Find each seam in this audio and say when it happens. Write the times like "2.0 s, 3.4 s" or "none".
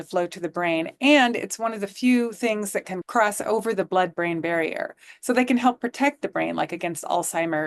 2.9 s